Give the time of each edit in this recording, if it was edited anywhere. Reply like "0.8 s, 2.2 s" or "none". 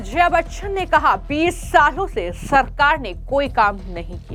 none